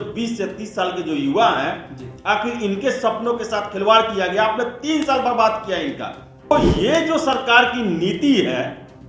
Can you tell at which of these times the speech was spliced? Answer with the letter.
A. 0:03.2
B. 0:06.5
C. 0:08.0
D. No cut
B